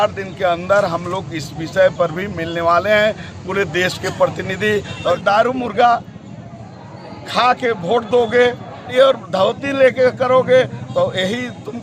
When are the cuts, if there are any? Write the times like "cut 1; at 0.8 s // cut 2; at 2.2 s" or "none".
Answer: cut 1; at 5.2 s // cut 2; at 8.9 s